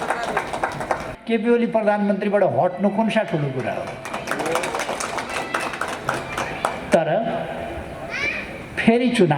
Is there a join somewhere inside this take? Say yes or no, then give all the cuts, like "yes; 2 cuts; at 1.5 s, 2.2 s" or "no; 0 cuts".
yes; 1 cut; at 1.1 s